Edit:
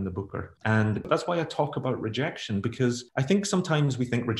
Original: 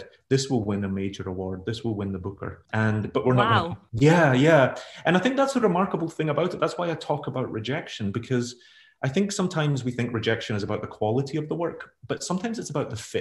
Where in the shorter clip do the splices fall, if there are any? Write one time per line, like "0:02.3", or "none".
0:01.0
0:03.1